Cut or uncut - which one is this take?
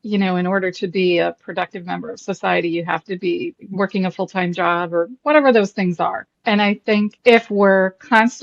cut